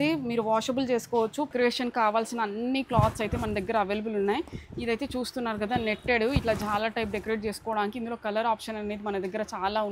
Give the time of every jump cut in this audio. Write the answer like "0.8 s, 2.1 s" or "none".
1.5 s